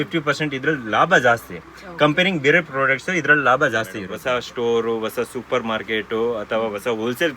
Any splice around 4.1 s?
yes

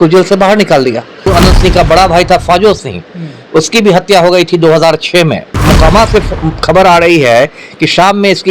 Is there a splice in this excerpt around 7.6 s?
no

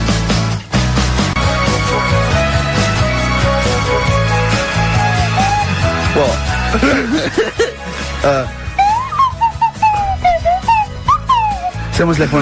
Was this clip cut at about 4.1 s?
no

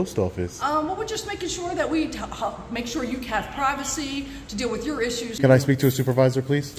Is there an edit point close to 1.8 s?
no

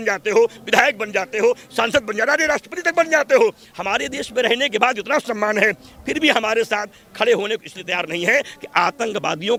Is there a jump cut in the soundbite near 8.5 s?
no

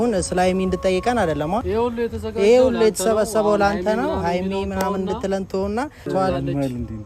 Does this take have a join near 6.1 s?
yes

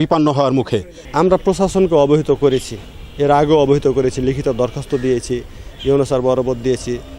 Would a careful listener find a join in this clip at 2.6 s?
no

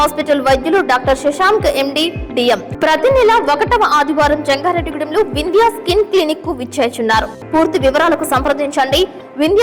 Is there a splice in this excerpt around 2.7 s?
yes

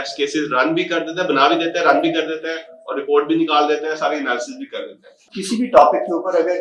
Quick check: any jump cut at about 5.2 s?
yes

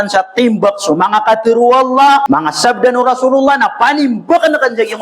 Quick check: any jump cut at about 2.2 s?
yes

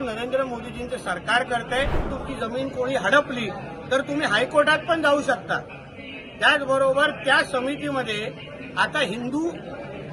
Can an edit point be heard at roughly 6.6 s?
no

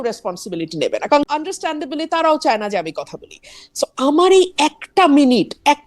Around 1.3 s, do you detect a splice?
yes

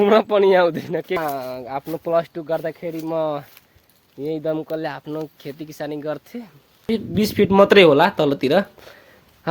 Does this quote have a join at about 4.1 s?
no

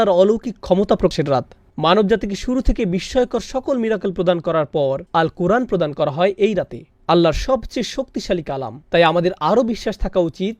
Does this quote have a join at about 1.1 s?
yes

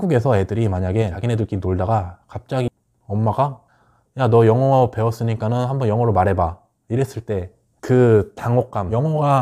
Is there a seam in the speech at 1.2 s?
yes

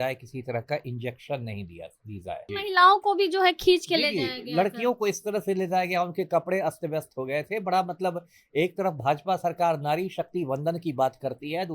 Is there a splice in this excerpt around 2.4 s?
yes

